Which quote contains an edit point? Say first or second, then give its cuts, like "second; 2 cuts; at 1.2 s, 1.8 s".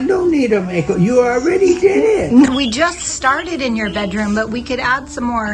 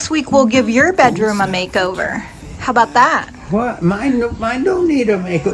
first; 1 cut; at 2.5 s